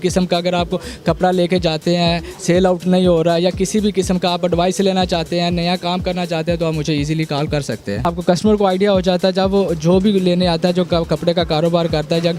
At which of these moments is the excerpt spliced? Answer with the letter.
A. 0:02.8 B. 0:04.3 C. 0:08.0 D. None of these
C